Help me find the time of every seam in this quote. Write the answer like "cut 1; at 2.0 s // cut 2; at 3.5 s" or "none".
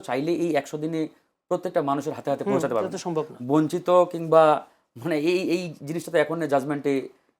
none